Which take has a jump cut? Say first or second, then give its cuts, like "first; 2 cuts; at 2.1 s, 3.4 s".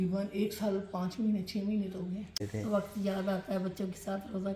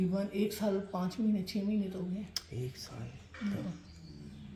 first; 1 cut; at 2.4 s